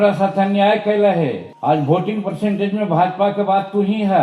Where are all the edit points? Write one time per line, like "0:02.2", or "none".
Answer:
0:01.5